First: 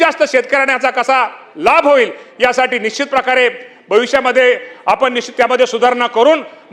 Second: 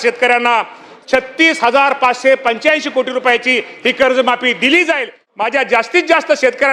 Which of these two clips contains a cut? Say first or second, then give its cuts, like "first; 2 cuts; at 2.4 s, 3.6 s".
second; 1 cut; at 5.2 s